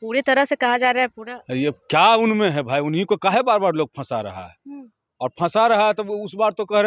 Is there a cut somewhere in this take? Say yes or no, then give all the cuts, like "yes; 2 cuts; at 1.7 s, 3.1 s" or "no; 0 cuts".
no; 0 cuts